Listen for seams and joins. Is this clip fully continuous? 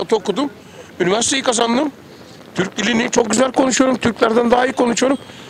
yes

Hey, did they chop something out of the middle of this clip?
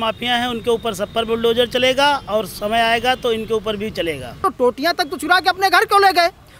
yes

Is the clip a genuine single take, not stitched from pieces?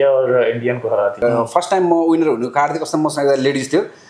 no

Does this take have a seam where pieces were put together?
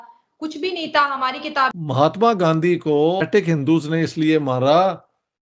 yes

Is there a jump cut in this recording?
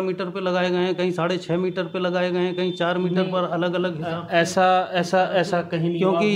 no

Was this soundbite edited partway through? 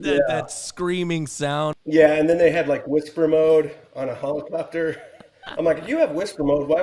yes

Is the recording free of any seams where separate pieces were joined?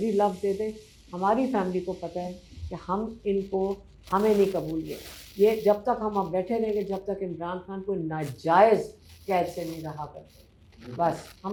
yes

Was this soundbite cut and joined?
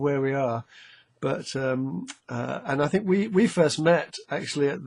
yes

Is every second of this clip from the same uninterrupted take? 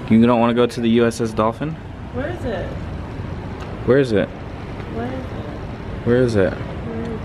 yes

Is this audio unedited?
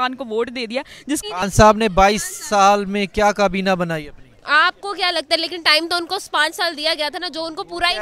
no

